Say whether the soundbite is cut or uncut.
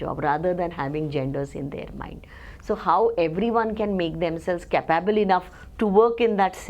uncut